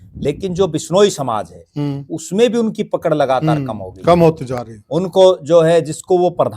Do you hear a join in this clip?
no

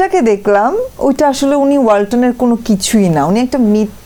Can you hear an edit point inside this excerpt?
no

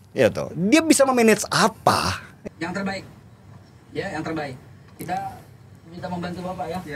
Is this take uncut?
no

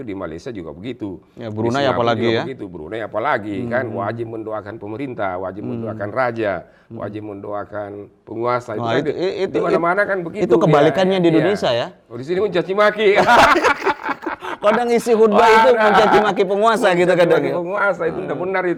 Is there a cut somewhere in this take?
no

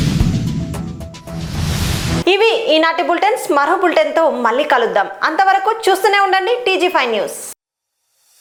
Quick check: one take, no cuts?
yes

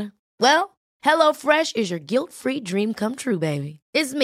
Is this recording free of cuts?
yes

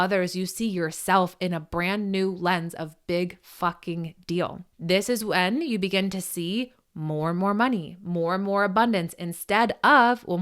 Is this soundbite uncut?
no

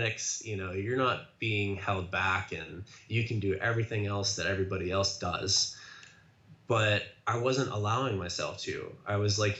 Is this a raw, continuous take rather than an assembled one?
yes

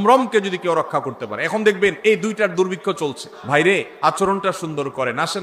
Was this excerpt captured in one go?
no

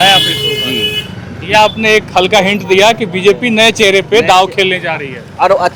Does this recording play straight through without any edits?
yes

